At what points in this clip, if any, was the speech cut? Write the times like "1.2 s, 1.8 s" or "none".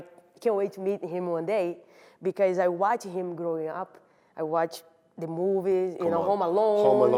none